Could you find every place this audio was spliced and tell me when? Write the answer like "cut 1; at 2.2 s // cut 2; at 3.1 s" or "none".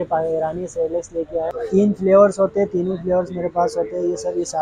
cut 1; at 1.6 s